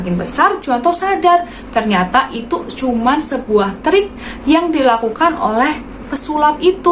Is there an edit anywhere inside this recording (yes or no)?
no